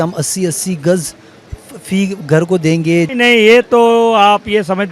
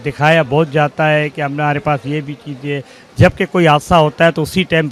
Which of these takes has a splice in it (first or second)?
first